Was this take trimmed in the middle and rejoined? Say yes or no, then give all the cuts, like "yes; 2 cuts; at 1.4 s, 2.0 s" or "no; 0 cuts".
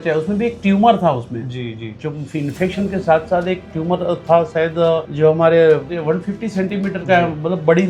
yes; 2 cuts; at 5.1 s, 5.9 s